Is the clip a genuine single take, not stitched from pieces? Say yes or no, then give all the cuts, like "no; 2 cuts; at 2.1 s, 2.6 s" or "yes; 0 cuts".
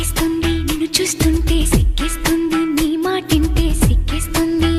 yes; 0 cuts